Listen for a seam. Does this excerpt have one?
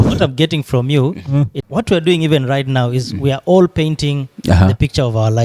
yes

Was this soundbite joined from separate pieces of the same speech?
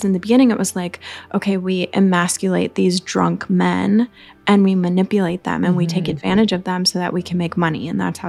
no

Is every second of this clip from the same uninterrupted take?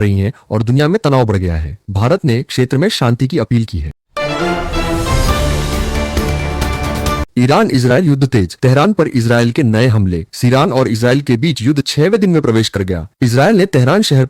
no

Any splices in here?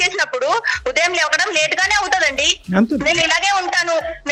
no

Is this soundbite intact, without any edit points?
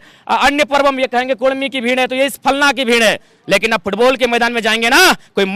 yes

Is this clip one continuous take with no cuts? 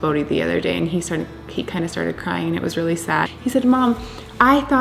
yes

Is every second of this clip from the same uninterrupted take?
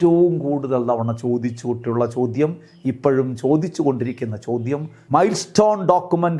no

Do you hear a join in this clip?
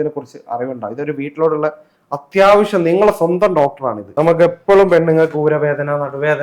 yes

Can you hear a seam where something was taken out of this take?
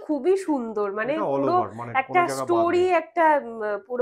no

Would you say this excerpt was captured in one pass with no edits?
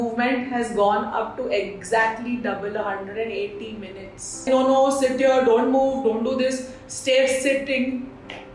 no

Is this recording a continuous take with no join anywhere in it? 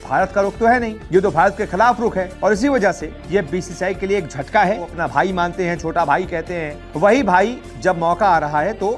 no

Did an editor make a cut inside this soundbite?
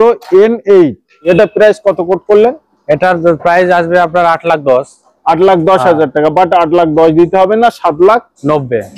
yes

